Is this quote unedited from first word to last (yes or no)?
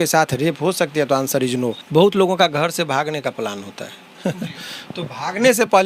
no